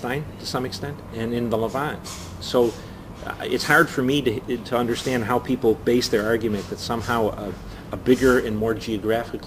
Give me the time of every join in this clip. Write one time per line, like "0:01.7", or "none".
0:05.0